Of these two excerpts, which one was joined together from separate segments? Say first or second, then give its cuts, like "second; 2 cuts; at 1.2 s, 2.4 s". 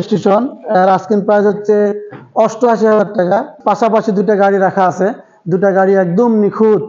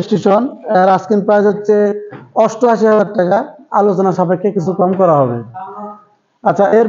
first; 1 cut; at 3.5 s